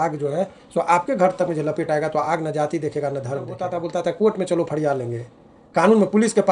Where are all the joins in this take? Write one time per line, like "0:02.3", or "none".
0:03.7